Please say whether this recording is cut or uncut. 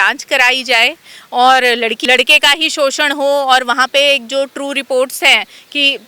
cut